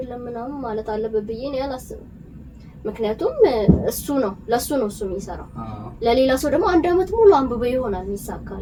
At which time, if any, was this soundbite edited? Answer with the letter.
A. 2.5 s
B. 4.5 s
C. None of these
C